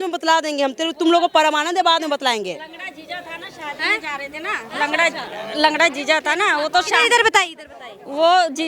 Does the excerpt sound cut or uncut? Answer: uncut